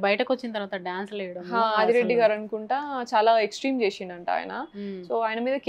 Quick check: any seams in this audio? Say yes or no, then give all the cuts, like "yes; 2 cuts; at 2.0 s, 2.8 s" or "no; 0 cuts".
no; 0 cuts